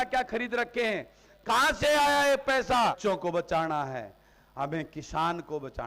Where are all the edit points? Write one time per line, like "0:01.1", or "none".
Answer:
0:03.0